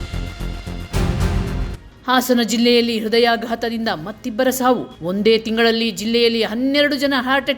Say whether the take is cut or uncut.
cut